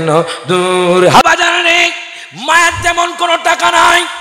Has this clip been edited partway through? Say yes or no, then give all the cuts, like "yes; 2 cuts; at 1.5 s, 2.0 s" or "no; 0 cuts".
yes; 1 cut; at 1.2 s